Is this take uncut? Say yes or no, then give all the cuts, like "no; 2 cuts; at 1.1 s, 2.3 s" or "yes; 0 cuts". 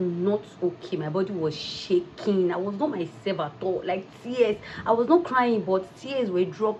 yes; 0 cuts